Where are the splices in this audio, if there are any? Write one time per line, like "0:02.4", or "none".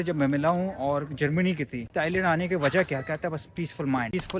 0:01.9